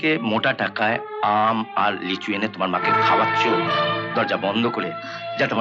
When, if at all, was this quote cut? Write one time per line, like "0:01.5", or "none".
none

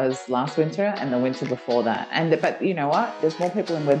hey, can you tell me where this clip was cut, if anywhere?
0:03.0

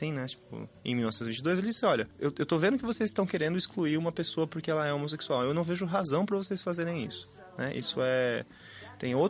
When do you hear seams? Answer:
0:02.1

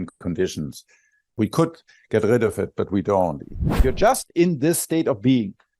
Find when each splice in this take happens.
0:01.3
0:03.8

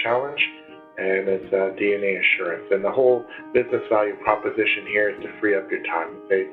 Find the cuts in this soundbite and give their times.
none

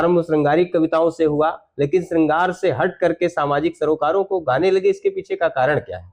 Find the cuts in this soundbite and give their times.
none

